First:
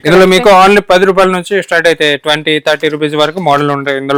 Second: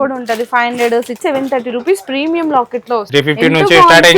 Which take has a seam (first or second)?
second